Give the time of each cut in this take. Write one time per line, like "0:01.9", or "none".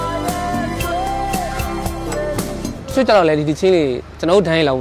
0:02.7